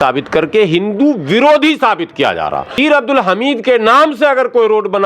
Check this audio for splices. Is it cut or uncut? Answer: cut